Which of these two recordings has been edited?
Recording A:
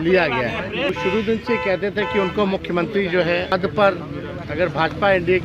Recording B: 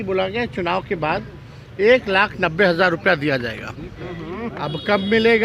A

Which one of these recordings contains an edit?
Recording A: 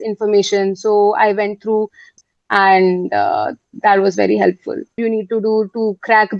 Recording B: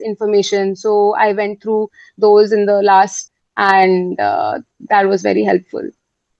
A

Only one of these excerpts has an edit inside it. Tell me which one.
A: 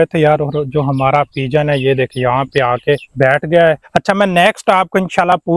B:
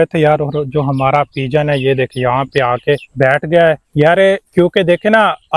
A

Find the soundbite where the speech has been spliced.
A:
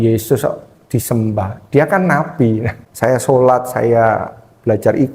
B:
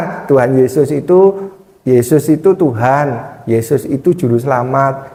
A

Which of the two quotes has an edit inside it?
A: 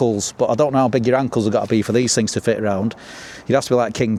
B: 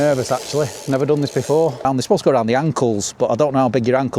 B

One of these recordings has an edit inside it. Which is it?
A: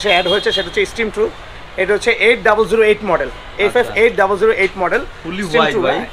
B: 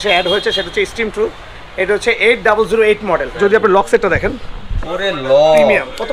B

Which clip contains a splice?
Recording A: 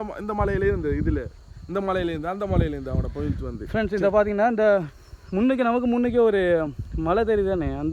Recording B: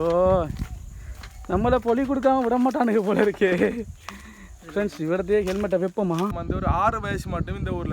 B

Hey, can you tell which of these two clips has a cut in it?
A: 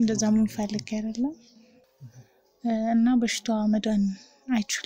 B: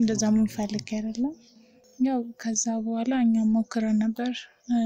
A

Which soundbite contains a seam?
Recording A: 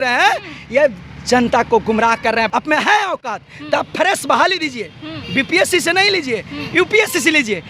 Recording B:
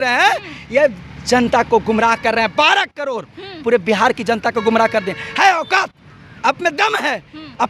A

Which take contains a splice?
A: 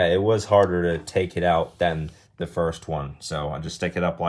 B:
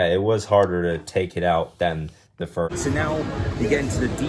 B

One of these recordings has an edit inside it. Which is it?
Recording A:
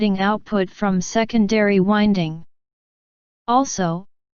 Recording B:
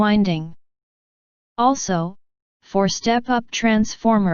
B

